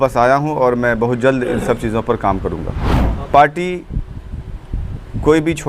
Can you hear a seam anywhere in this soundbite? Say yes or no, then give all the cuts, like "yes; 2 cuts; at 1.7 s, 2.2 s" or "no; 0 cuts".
yes; 1 cut; at 3.0 s